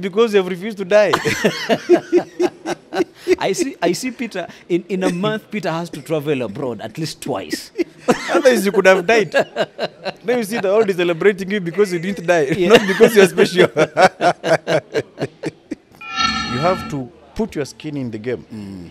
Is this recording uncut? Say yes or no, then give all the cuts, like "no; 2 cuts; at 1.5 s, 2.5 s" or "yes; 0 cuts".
no; 1 cut; at 16.5 s